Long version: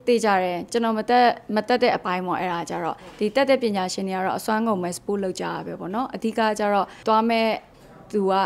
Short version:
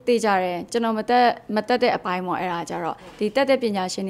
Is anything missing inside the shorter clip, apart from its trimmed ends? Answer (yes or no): no